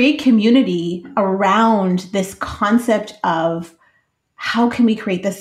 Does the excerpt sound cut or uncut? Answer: cut